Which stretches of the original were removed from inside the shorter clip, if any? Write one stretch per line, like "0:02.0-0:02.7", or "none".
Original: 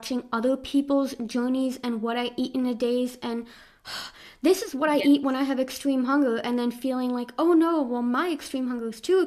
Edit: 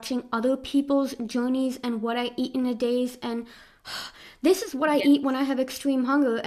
none